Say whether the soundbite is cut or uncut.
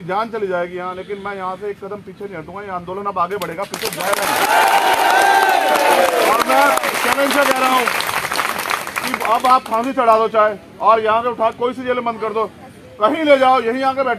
uncut